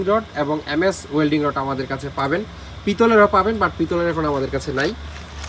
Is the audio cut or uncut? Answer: uncut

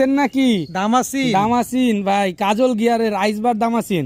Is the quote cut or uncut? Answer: uncut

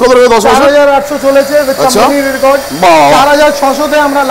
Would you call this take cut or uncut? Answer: uncut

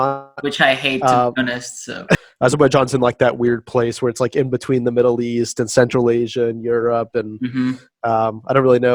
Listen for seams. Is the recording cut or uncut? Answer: cut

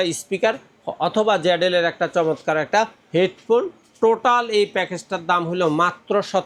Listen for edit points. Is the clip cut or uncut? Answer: uncut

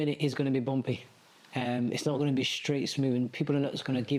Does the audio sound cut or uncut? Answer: uncut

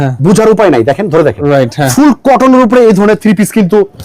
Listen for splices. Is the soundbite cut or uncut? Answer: cut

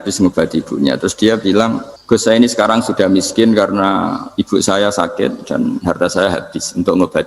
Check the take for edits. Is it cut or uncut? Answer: cut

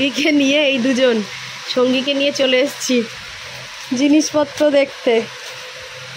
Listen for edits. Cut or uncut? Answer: uncut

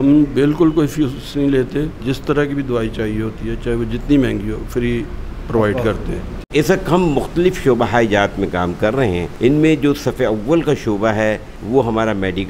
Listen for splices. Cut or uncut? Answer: cut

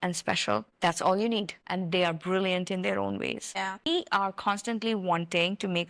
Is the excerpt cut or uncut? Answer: cut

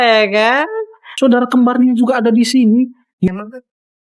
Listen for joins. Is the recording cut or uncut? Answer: cut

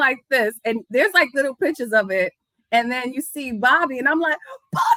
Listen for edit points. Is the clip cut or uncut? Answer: uncut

